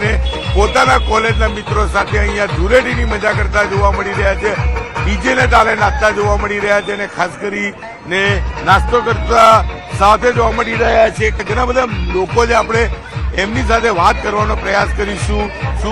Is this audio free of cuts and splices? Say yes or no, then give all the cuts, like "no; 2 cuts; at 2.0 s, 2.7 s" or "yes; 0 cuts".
yes; 0 cuts